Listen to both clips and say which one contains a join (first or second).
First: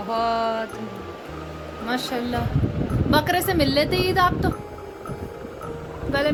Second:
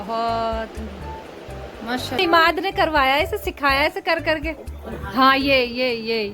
second